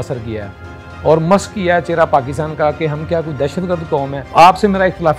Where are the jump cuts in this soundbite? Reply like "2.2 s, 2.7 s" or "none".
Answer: 4.2 s